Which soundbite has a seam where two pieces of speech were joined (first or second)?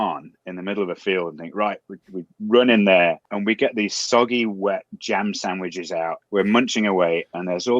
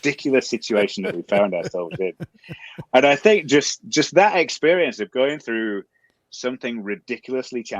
first